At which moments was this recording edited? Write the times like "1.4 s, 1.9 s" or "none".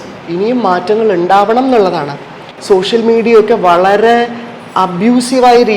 2.5 s